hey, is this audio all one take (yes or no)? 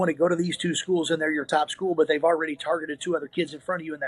yes